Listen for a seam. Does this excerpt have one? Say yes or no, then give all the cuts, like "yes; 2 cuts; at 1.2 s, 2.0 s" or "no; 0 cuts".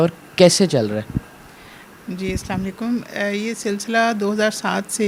no; 0 cuts